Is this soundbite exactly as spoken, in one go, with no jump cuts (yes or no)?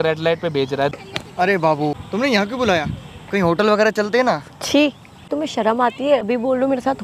no